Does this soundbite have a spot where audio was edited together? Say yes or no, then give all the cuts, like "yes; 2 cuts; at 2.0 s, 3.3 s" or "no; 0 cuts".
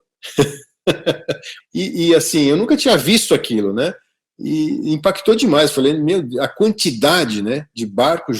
yes; 1 cut; at 1.5 s